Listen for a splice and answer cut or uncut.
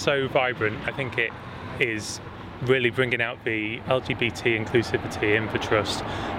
cut